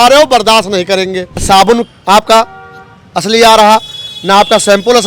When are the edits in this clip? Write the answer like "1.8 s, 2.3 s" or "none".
1.4 s